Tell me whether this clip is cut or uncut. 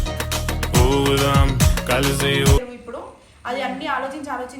cut